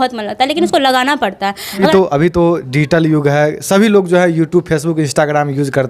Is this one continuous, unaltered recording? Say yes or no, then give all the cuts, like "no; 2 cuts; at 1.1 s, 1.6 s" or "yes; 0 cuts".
no; 1 cut; at 1.9 s